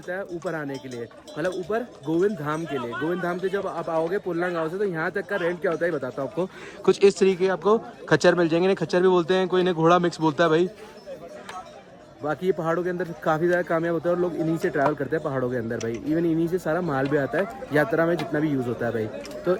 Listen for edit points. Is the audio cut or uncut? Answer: uncut